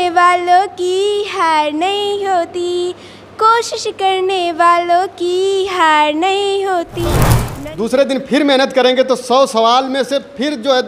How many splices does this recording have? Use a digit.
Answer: 1